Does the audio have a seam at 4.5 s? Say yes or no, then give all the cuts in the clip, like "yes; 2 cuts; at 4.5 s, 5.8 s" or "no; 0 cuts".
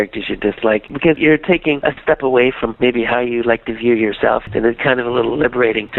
yes; 1 cut; at 4.5 s